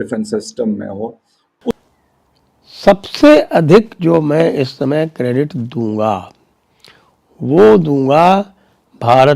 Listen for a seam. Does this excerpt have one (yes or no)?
yes